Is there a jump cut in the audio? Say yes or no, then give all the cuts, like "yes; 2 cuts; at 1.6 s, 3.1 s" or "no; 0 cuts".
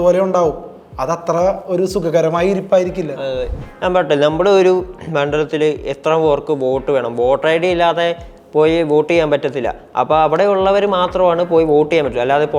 yes; 1 cut; at 3.6 s